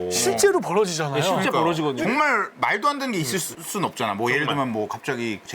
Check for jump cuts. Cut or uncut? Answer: cut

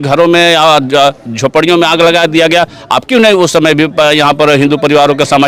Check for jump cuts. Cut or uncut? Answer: uncut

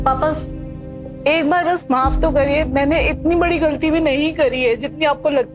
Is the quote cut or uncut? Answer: uncut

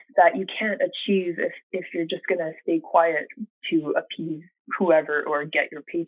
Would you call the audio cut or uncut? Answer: uncut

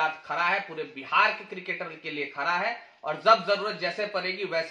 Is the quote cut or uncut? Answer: uncut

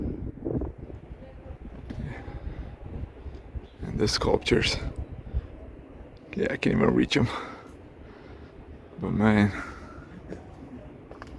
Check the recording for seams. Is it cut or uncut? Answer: uncut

